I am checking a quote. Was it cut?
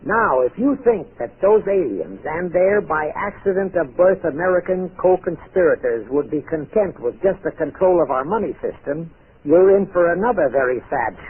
yes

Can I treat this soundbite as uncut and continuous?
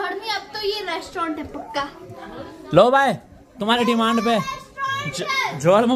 yes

